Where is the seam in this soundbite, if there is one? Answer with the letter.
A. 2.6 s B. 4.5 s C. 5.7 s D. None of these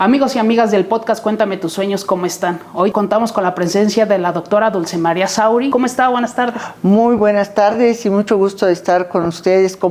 D